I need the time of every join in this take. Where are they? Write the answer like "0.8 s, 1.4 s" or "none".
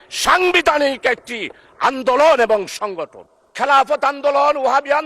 3.5 s

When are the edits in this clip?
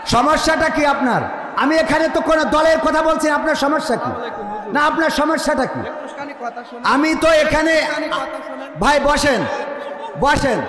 none

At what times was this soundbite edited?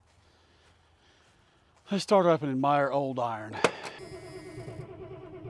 4.0 s

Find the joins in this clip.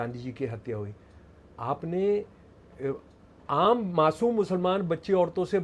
none

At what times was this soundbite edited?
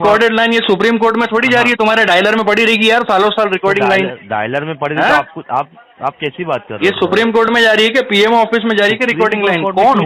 none

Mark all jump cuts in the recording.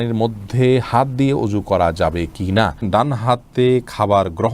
2.8 s

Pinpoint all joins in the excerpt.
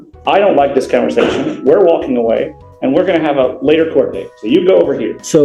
none

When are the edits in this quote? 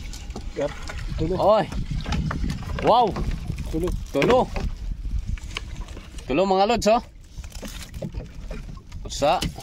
none

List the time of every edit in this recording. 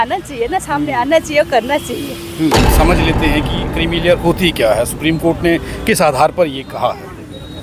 2.7 s

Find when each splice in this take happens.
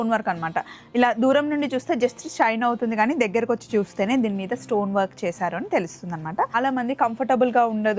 6.5 s

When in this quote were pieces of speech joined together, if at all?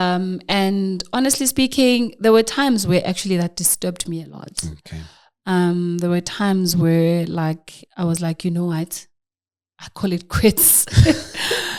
none

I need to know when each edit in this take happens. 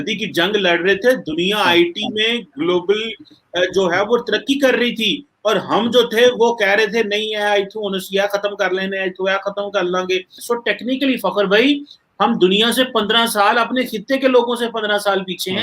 10.4 s

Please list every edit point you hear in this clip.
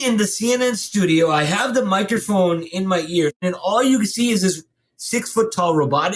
3.4 s

